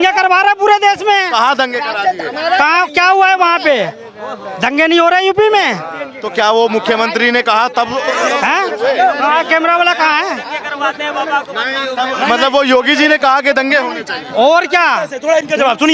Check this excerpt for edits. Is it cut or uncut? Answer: uncut